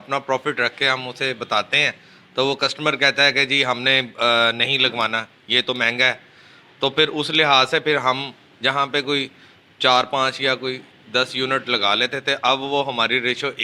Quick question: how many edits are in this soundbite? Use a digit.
0